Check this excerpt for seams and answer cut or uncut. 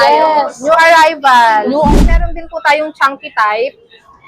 cut